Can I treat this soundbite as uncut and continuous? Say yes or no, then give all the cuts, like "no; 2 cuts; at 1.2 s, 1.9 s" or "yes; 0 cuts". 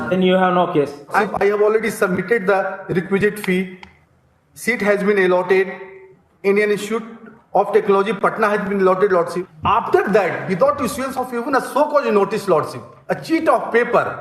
no; 2 cuts; at 1.2 s, 9.5 s